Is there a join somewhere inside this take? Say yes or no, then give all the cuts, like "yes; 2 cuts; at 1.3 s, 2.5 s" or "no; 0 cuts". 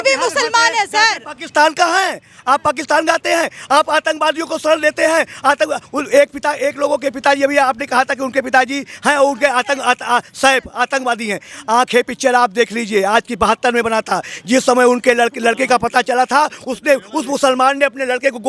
no; 0 cuts